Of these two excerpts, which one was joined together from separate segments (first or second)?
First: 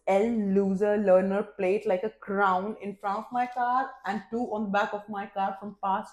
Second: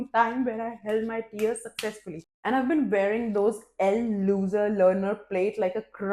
second